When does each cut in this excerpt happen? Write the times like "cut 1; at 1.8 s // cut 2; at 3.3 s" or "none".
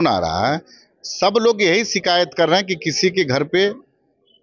none